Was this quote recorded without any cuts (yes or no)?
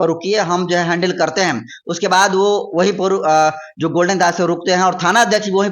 yes